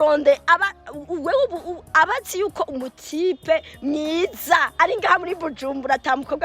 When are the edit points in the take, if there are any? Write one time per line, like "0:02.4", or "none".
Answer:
none